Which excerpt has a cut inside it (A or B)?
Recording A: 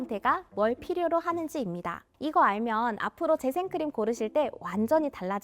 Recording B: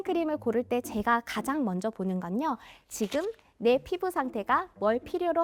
A